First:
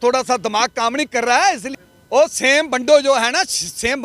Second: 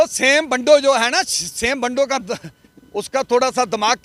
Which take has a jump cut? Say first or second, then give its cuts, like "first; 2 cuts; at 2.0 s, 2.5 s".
first; 1 cut; at 1.7 s